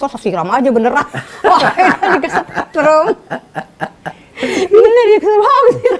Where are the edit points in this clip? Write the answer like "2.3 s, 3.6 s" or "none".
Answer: none